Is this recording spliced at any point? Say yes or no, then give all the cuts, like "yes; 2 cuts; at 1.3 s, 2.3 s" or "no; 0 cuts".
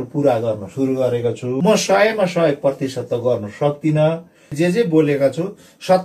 yes; 2 cuts; at 1.5 s, 4.5 s